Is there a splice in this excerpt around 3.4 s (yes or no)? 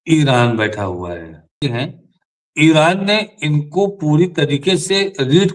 no